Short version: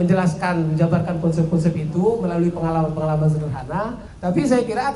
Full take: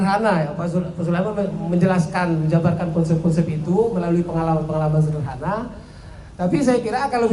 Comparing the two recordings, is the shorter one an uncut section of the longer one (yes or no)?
no